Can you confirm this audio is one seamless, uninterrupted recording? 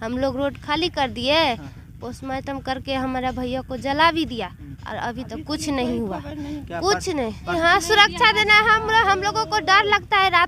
yes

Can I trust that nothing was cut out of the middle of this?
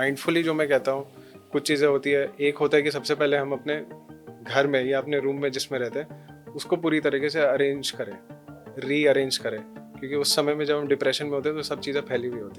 yes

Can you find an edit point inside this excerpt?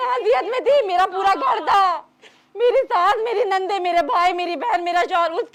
no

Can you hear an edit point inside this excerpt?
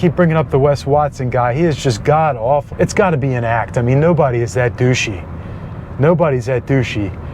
yes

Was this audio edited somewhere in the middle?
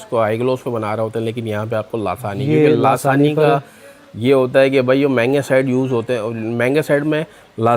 no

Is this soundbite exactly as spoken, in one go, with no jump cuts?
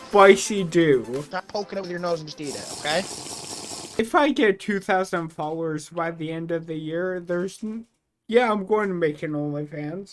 yes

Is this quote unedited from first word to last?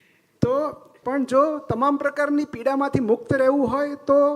no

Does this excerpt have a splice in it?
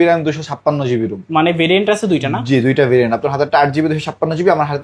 no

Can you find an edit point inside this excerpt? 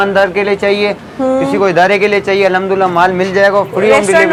no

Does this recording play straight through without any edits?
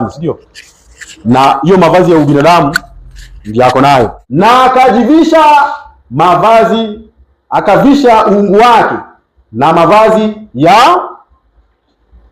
no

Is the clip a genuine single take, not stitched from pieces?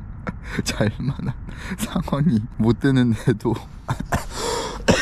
no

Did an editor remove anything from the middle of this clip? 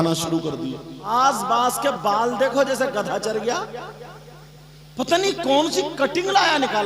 yes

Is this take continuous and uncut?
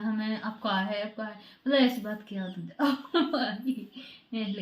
yes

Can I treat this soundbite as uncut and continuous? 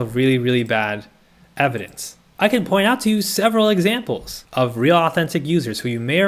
yes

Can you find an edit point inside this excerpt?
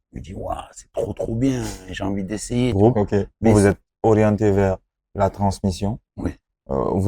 yes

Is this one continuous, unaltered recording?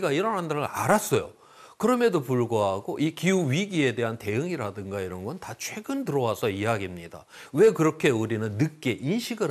yes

